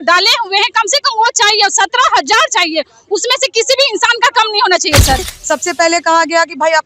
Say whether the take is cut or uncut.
cut